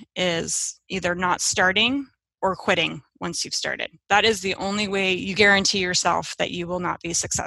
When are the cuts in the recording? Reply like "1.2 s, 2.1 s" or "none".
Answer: 5.1 s